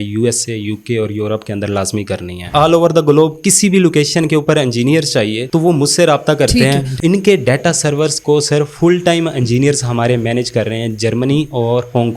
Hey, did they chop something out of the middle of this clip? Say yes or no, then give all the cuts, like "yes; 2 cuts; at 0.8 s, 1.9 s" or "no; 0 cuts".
yes; 2 cuts; at 2.4 s, 6.9 s